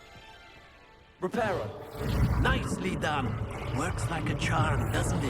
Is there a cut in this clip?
no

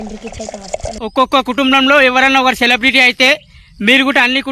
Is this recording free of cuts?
yes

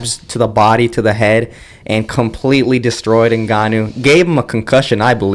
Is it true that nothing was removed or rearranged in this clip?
yes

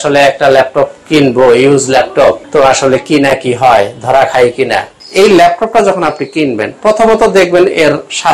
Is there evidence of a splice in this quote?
yes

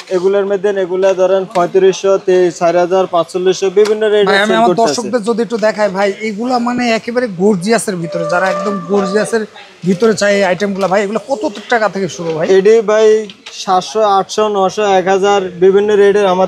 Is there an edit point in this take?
no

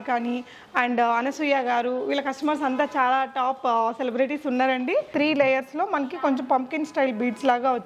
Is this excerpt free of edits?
no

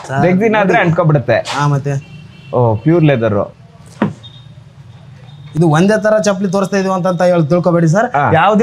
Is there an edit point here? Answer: no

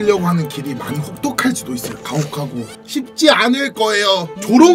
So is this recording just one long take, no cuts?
no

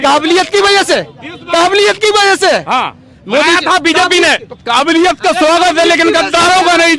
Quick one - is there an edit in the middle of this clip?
no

